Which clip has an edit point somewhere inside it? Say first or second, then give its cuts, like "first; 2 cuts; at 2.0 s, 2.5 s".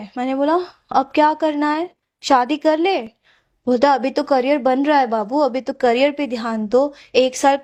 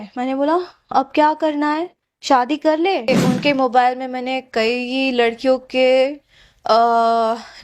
second; 1 cut; at 3.1 s